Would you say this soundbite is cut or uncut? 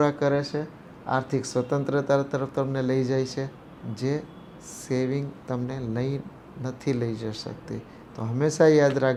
uncut